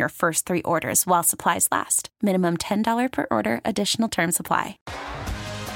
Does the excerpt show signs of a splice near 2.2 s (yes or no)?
no